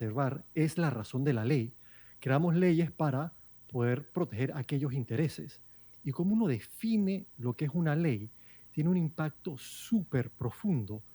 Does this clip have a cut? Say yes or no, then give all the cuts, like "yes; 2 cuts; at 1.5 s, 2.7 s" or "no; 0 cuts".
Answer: no; 0 cuts